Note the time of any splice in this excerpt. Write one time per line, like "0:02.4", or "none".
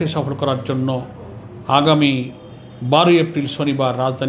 none